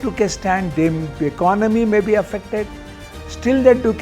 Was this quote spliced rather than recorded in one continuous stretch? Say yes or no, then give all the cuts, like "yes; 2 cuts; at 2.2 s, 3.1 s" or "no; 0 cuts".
no; 0 cuts